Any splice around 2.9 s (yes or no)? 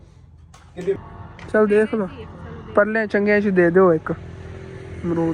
no